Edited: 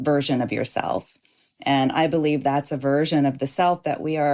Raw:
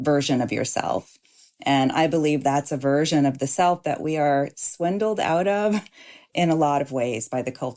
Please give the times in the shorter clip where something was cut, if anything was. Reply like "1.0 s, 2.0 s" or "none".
none